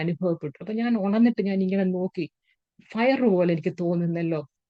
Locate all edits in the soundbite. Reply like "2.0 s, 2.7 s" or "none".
none